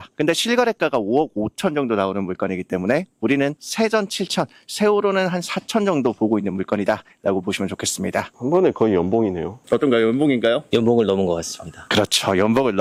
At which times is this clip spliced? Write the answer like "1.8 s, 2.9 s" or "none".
none